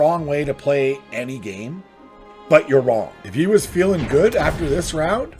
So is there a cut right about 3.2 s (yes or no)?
yes